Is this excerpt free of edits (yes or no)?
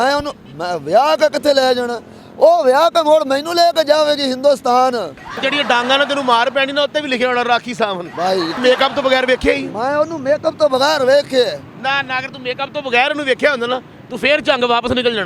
no